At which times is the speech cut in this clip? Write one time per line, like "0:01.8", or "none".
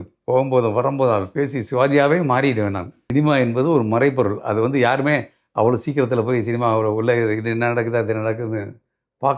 0:02.9